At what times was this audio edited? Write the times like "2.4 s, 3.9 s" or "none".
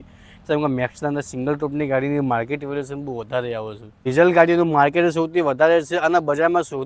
4.1 s